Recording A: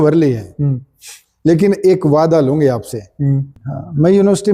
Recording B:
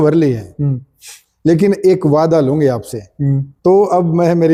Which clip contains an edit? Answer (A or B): A